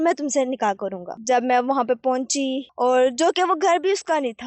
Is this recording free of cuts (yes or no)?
no